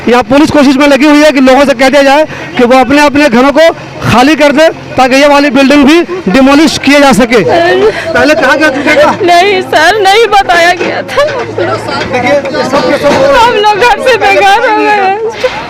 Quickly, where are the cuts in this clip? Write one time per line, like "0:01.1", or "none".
none